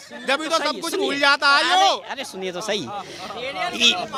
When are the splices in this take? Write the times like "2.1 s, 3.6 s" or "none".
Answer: none